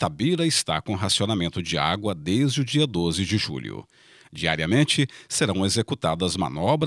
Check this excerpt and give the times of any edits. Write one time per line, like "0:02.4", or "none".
none